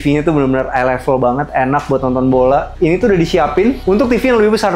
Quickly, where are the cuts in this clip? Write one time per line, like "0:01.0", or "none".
0:02.7
0:03.8